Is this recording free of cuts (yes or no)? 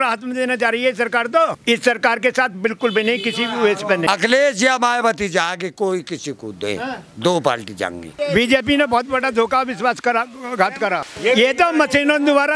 no